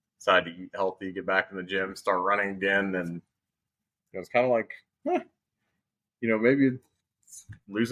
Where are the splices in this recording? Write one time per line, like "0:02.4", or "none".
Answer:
none